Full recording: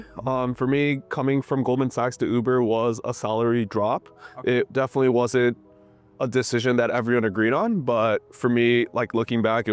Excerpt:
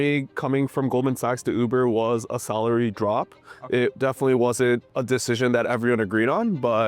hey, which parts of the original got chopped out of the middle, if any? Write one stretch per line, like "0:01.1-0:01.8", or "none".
0:05.7-0:06.2